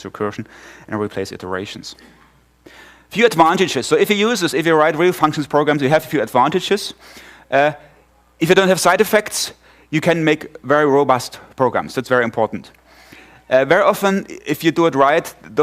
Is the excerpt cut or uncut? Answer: cut